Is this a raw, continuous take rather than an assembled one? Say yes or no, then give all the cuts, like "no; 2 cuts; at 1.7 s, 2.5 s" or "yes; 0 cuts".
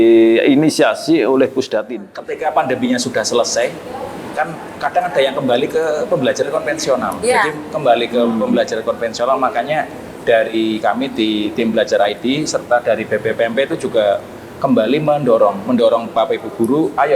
no; 1 cut; at 2.1 s